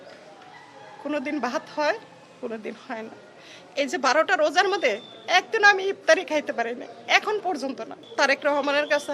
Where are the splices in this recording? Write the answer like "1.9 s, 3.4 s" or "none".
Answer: 8.0 s